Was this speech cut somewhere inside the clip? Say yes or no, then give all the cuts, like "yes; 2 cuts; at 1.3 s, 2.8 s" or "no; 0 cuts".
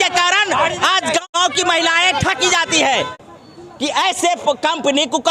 yes; 2 cuts; at 1.3 s, 3.1 s